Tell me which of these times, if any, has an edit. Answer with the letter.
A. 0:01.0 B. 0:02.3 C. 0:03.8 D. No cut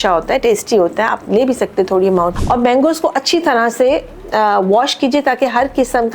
B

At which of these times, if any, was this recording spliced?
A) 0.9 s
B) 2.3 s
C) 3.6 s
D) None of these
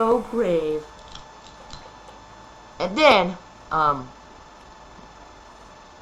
D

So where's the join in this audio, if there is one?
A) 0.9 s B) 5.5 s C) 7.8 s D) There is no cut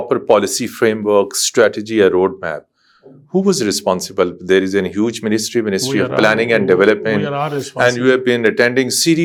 D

